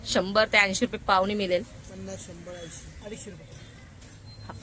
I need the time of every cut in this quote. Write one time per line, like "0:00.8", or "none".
0:03.0